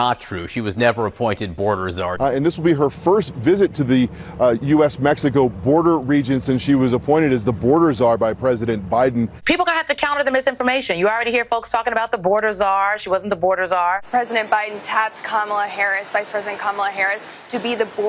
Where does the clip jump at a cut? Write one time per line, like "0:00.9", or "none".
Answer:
0:02.2
0:09.3
0:14.0